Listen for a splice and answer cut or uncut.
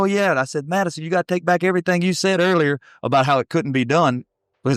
uncut